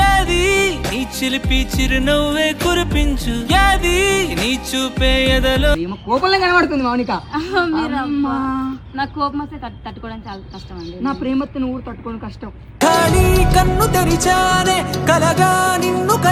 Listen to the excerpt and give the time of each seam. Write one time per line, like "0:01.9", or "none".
0:05.8